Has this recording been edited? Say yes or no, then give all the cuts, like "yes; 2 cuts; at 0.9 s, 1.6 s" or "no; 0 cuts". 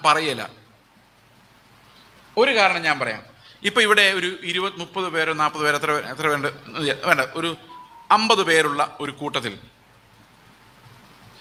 no; 0 cuts